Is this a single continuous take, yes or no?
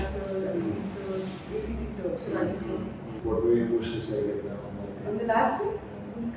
no